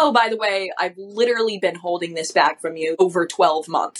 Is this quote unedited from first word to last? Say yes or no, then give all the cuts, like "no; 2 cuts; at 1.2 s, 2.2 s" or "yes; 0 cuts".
no; 1 cut; at 3.0 s